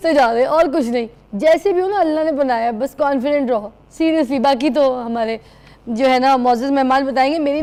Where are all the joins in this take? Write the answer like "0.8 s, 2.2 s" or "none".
none